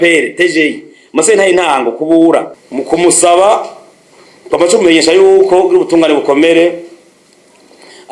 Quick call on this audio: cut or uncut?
cut